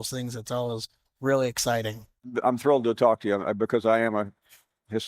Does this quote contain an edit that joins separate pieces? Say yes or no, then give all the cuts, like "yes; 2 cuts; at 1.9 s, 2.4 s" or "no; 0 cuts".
yes; 1 cut; at 2.4 s